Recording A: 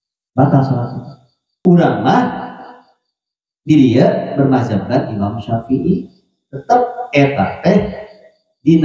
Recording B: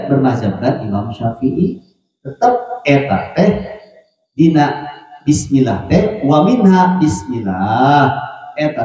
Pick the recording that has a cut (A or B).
A